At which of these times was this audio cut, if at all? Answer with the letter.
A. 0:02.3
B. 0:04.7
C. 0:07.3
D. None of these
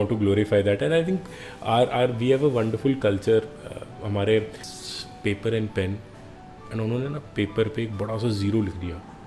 B